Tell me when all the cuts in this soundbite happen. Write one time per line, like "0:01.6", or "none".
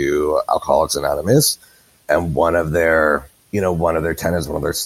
0:02.0
0:03.4